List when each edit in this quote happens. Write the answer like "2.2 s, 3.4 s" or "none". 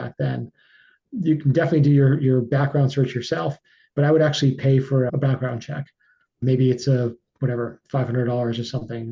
none

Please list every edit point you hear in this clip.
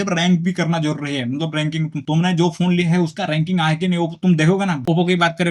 none

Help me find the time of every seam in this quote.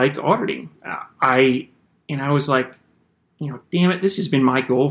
none

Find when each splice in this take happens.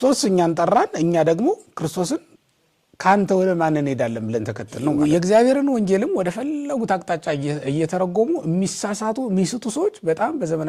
4.8 s

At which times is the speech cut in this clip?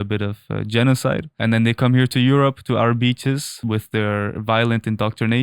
1.4 s, 3.6 s

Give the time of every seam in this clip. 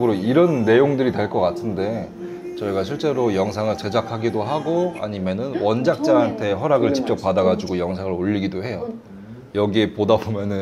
9.4 s

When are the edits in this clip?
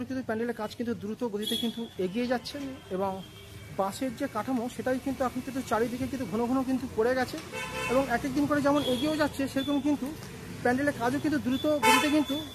none

